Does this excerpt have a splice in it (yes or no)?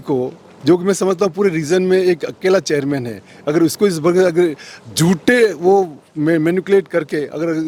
no